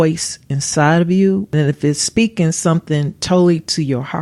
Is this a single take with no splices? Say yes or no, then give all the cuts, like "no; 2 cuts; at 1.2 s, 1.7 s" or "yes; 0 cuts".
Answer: no; 1 cut; at 1.5 s